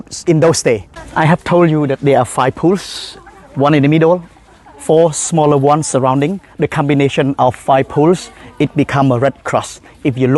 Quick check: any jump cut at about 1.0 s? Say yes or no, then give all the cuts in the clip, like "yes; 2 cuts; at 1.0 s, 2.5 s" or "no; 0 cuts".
yes; 1 cut; at 1.0 s